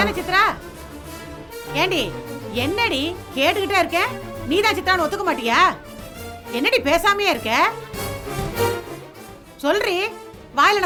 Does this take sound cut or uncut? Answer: uncut